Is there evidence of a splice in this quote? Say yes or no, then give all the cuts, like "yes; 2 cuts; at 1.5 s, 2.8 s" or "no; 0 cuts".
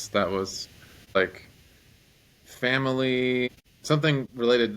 yes; 2 cuts; at 1.2 s, 3.6 s